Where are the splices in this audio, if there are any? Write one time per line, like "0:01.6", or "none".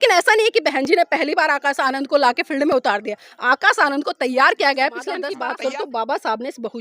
0:05.3